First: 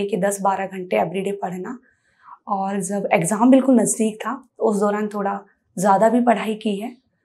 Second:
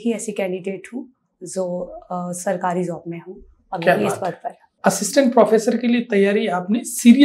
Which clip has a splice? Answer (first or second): second